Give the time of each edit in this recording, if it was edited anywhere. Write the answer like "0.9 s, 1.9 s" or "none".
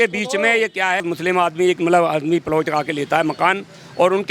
1.0 s